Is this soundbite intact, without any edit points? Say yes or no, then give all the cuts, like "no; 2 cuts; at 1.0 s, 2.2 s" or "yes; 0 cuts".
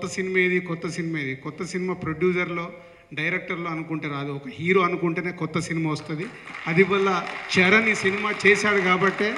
yes; 0 cuts